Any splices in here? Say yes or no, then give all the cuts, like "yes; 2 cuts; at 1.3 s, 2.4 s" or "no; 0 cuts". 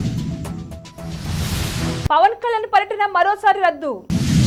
no; 0 cuts